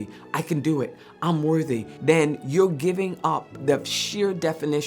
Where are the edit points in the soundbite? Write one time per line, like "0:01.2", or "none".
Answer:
0:01.9
0:03.5